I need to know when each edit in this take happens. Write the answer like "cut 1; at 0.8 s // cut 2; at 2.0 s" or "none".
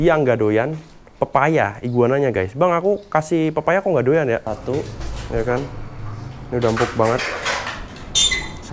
cut 1; at 4.5 s

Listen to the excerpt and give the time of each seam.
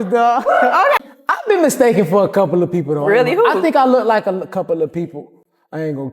cut 1; at 1.0 s

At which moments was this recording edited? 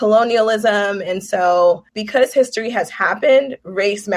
cut 1; at 1.9 s

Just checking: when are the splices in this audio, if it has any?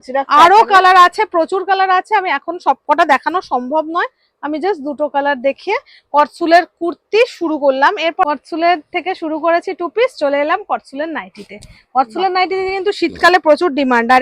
none

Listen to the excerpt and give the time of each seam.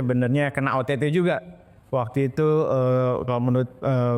none

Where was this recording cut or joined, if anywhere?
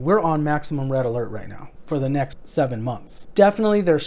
cut 1; at 2.2 s // cut 2; at 3.1 s

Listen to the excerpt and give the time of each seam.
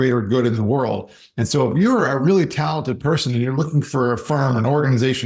none

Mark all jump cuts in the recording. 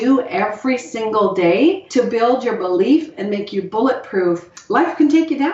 cut 1; at 1.8 s // cut 2; at 4.5 s

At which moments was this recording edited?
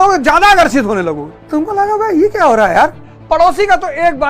cut 1; at 1.3 s // cut 2; at 3.1 s

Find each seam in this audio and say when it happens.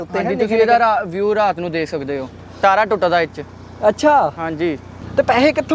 cut 1; at 2.5 s // cut 2; at 4.9 s

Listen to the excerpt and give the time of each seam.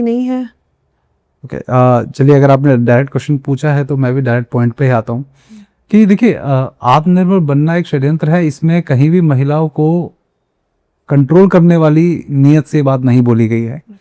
none

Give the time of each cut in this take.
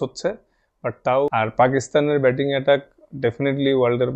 cut 1; at 1.3 s

